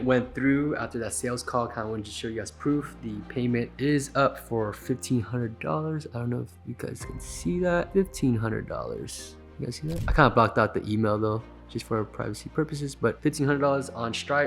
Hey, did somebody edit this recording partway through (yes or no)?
yes